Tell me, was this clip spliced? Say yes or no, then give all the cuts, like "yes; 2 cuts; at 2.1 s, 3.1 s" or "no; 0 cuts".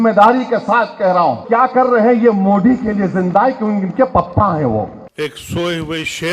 yes; 2 cuts; at 1.4 s, 5.0 s